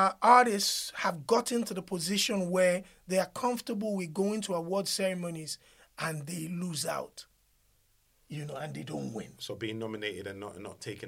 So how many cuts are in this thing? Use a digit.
0